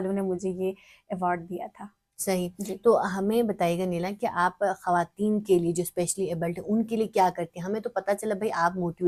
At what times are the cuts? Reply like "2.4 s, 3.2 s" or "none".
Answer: none